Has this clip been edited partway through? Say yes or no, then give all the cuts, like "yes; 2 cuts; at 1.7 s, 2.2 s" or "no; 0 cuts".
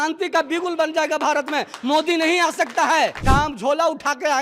yes; 1 cut; at 3.2 s